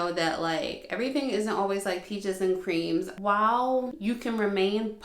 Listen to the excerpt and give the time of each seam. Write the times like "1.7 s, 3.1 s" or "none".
3.1 s, 3.9 s

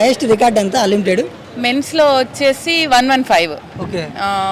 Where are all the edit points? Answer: none

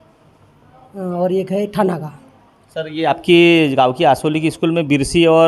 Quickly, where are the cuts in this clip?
none

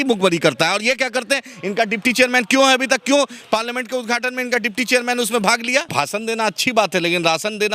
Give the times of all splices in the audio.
5.9 s

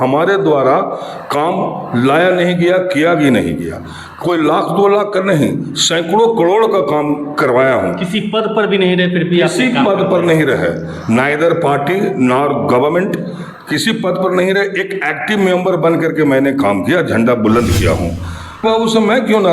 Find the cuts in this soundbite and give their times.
18.6 s

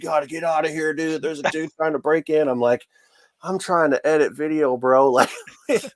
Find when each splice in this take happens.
none

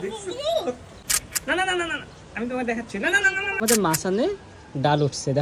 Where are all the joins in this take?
1.0 s, 3.5 s

